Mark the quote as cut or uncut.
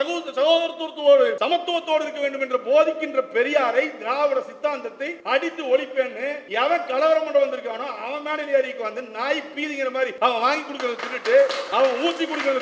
cut